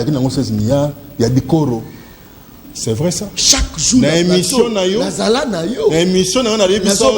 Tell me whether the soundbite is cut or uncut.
cut